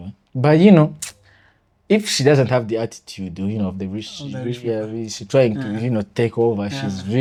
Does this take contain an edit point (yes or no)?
no